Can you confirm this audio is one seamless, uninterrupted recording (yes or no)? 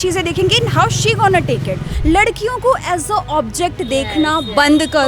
no